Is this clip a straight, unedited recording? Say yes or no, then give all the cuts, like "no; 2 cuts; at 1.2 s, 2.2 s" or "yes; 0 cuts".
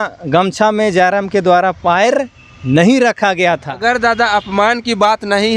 no; 1 cut; at 3.7 s